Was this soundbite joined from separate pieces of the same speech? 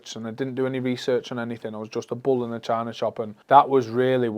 yes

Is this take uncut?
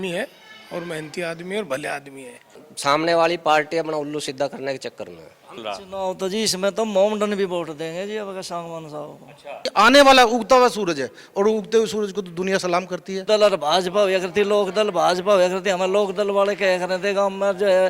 no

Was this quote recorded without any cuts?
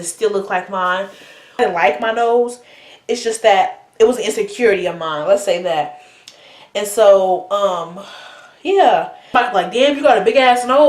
no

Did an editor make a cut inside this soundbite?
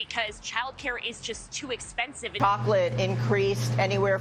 yes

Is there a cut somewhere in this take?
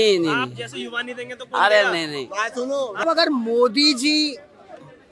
yes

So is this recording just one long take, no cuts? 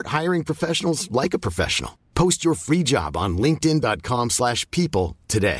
yes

